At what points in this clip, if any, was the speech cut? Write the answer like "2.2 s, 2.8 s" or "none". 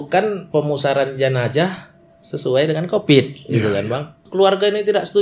4.2 s